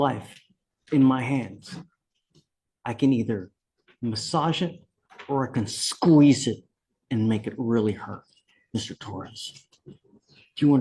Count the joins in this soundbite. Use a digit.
0